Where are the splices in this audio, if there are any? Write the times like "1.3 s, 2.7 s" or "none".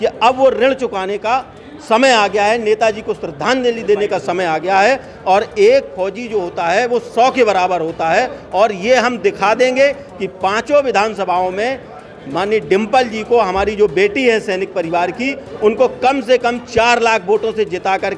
none